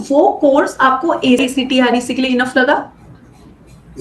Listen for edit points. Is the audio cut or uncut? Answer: cut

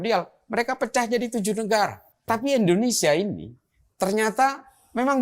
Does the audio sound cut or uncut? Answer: cut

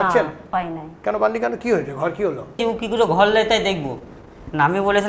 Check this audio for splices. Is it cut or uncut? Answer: cut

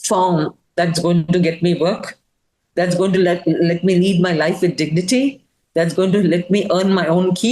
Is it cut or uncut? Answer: uncut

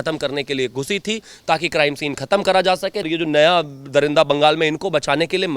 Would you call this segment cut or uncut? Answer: cut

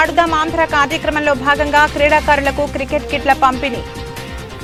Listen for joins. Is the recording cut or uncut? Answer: uncut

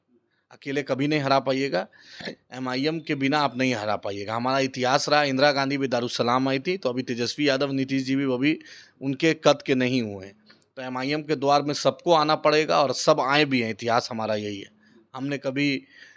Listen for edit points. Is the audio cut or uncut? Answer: uncut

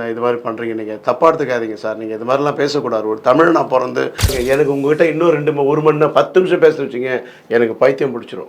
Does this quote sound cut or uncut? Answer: cut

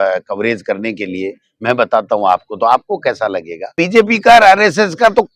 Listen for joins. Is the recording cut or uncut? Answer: cut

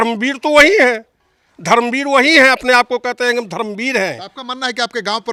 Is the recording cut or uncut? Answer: uncut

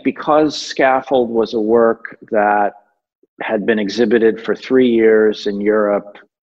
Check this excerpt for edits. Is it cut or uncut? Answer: uncut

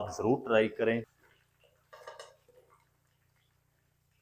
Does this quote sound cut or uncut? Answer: cut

